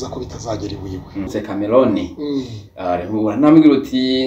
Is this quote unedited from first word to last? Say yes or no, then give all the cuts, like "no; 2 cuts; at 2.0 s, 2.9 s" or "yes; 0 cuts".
no; 1 cut; at 1.3 s